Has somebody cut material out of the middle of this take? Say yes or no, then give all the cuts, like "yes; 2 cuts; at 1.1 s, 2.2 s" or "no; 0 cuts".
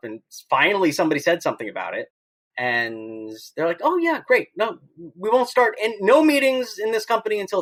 no; 0 cuts